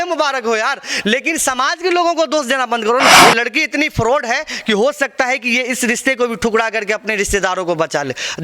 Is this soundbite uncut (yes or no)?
no